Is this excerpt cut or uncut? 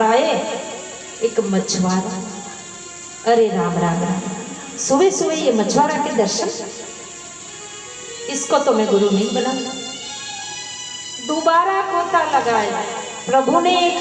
uncut